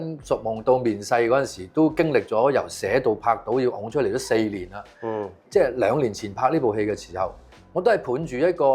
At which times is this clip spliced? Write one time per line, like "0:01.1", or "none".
none